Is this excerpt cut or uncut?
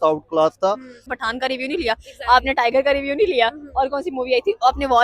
cut